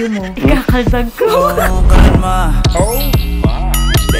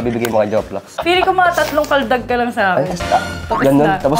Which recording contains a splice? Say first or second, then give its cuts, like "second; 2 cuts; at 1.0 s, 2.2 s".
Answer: second; 1 cut; at 0.9 s